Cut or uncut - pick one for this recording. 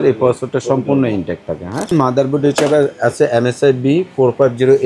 cut